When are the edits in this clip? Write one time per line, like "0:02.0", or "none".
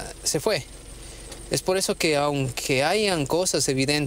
none